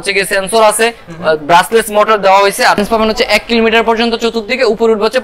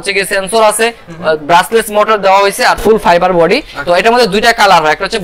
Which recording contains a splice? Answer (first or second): first